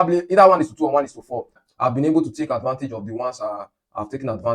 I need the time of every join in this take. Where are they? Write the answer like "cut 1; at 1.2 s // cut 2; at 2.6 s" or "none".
cut 1; at 1.6 s